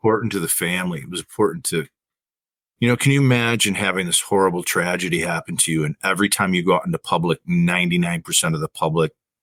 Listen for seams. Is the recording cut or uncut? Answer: uncut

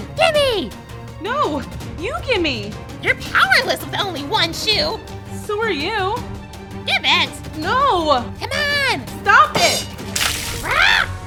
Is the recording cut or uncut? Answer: uncut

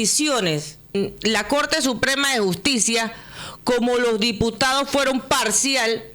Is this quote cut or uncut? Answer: cut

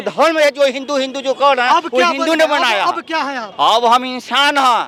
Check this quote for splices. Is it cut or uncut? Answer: uncut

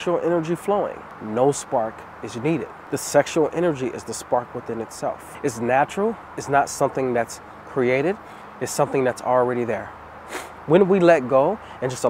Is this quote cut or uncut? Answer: cut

